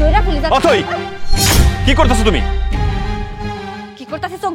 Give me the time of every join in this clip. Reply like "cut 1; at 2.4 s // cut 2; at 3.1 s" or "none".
none